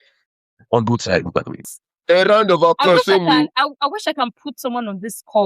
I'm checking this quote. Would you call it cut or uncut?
cut